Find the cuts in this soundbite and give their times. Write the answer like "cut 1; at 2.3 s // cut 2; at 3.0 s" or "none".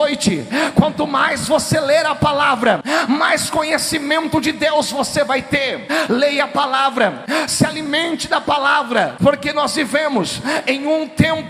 cut 1; at 2.8 s // cut 2; at 5.9 s // cut 3; at 7.2 s // cut 4; at 9.2 s